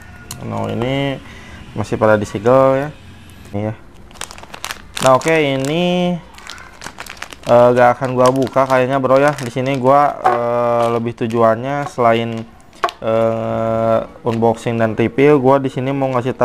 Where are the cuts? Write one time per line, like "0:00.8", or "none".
0:03.5

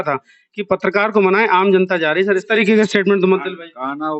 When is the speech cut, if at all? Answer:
0:02.4

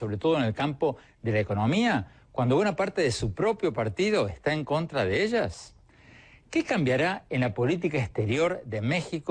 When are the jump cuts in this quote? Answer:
0:01.1

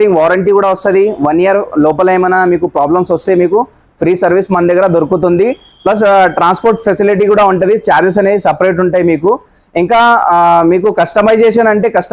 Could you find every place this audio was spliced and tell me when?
none

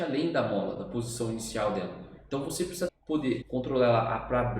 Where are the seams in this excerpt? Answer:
0:03.3

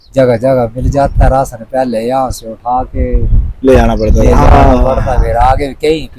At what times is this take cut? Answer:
none

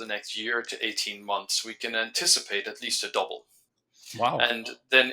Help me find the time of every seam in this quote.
none

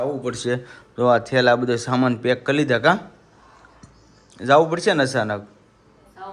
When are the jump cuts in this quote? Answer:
none

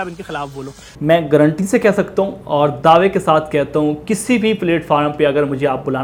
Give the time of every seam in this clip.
none

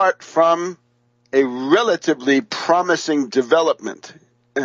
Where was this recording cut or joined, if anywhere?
none

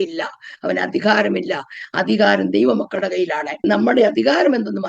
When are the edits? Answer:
0:03.6

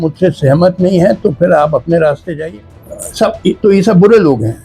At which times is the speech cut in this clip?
0:02.4

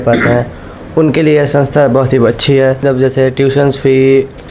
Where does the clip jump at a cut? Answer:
0:02.8

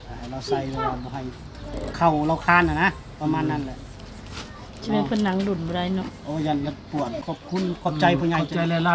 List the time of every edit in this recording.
0:07.3

